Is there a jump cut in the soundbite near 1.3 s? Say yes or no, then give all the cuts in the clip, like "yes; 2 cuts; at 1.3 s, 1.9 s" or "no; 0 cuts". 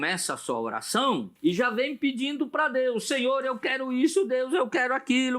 yes; 1 cut; at 1.3 s